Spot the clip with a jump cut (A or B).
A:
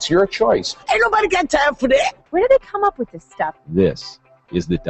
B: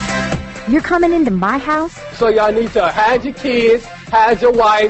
A